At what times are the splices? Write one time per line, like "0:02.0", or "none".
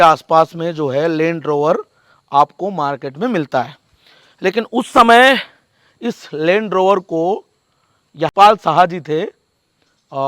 0:08.3